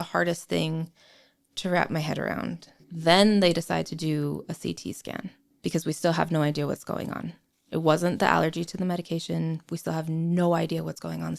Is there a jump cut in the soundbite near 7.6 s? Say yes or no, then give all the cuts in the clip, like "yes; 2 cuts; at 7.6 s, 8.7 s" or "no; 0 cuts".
no; 2 cuts; at 2.8 s, 5.4 s